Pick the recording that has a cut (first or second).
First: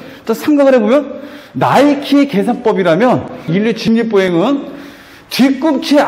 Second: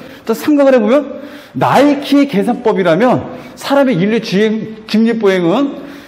first